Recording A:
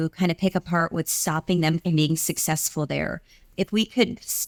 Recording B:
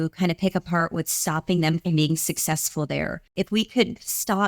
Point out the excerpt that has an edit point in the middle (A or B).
B